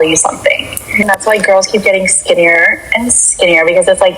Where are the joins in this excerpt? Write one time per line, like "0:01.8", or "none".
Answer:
0:01.1